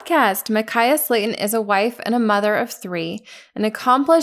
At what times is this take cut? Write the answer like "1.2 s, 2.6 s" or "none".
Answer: none